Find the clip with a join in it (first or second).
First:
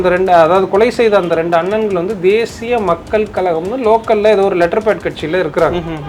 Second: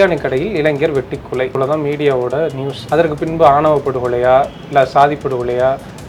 second